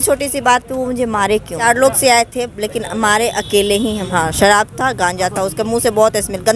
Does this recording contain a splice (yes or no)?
yes